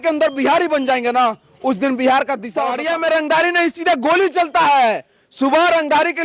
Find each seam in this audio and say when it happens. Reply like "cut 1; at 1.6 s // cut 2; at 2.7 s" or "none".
cut 1; at 2.7 s